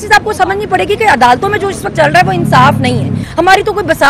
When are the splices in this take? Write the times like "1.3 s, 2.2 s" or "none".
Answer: 3.2 s